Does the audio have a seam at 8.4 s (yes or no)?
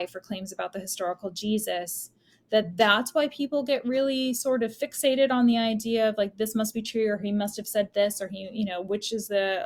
no